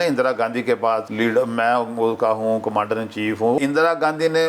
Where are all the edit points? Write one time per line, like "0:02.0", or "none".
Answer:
0:01.1
0:03.6